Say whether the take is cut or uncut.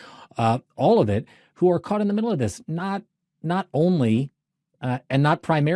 uncut